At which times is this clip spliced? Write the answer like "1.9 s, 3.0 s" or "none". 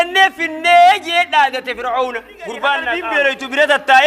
3.0 s